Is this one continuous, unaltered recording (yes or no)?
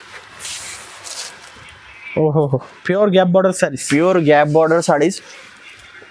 yes